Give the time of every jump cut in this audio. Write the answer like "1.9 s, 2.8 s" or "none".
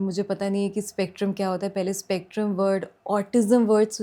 none

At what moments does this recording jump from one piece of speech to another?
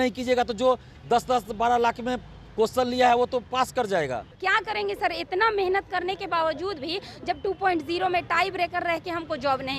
4.4 s

